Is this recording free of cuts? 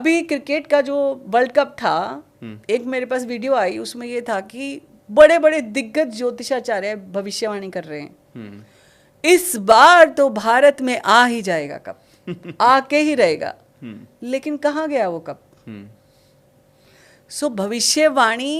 yes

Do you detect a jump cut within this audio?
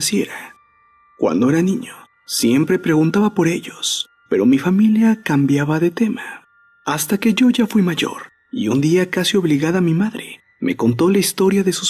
no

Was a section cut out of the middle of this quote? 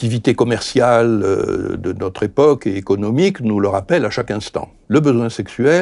yes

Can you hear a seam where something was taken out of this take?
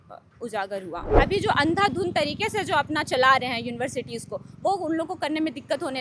yes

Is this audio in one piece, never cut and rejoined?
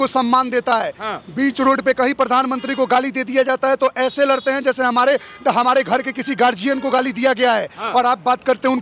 yes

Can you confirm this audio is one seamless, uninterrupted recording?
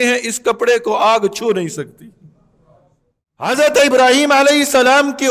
no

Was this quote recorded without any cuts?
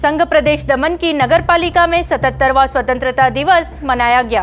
yes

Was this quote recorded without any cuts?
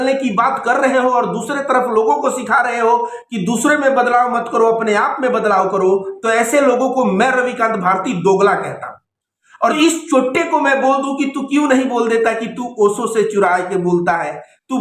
no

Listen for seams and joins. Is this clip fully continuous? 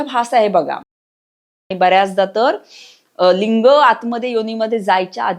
no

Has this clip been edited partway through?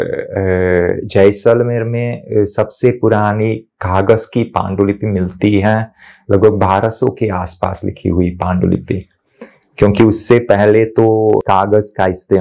yes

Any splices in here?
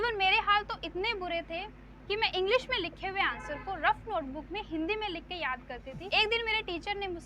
yes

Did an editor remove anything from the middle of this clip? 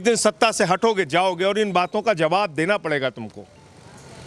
no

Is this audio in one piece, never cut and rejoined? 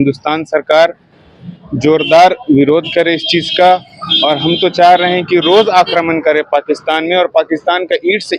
yes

